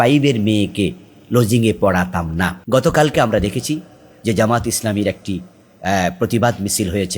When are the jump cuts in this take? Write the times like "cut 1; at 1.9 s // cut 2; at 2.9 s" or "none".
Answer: cut 1; at 2.6 s